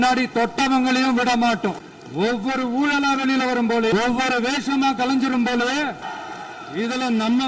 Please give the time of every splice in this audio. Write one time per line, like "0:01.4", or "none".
0:01.9
0:03.9
0:06.1